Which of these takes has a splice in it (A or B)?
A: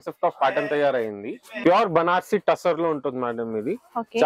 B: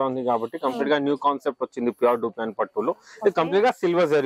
A